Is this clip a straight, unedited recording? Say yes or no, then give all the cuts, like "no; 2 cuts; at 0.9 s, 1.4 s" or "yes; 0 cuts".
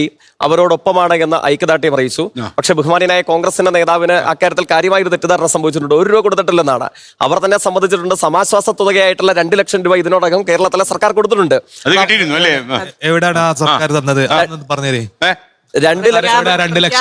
yes; 0 cuts